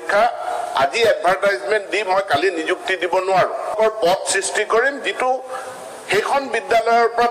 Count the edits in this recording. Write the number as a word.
one